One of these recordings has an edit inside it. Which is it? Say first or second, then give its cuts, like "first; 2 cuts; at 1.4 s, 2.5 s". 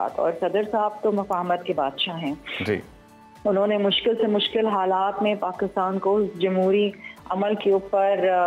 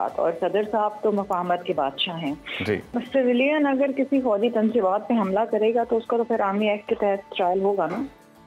second; 1 cut; at 3.0 s